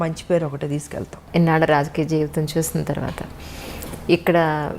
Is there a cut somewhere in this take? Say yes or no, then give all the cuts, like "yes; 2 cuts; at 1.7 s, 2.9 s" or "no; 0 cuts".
yes; 1 cut; at 1.1 s